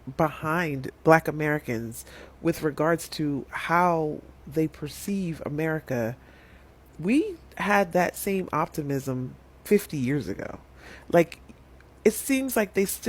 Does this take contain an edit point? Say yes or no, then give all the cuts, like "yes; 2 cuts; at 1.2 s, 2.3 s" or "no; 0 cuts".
no; 0 cuts